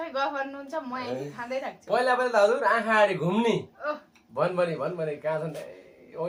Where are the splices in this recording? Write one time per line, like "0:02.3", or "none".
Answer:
none